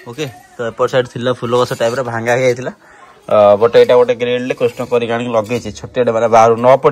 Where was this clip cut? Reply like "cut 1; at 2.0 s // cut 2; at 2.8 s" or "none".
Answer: none